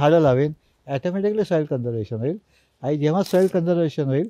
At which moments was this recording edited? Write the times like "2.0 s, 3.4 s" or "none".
none